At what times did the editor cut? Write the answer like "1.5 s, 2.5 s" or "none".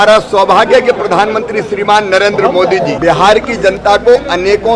3.0 s